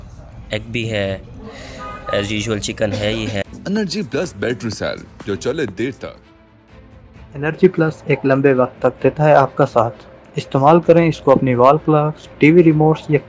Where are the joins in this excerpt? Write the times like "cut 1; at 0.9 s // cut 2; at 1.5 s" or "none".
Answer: none